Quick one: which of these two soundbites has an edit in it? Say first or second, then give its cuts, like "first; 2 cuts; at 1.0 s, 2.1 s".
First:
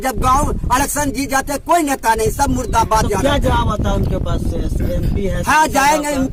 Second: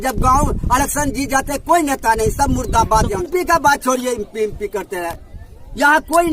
second; 1 cut; at 3.2 s